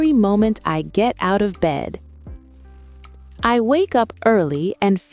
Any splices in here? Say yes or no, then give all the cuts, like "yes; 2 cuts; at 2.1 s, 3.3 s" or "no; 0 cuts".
yes; 2 cuts; at 2.0 s, 3.4 s